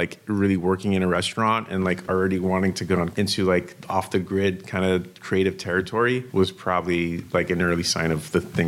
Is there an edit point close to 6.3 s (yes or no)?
yes